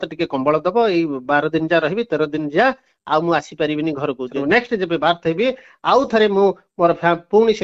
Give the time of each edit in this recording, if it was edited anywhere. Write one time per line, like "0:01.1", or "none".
0:04.3